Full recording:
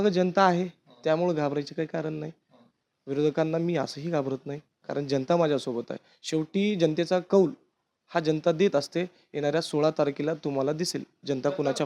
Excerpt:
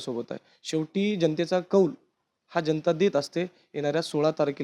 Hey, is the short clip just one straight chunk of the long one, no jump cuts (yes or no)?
yes